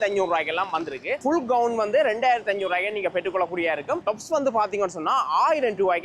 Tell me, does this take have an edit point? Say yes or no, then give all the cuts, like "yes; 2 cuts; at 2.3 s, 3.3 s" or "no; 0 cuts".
yes; 2 cuts; at 1.2 s, 4.0 s